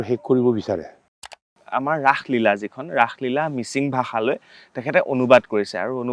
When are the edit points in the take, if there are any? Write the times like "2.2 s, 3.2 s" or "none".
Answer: 1.6 s